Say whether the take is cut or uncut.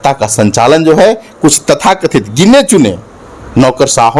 uncut